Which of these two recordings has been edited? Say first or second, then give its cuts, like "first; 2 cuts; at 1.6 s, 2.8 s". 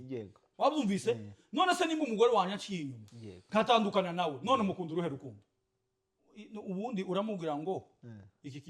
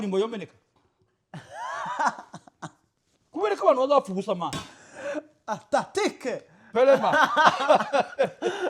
first; 1 cut; at 6.5 s